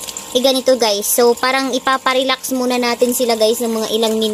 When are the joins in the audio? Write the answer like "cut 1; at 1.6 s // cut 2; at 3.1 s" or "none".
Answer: none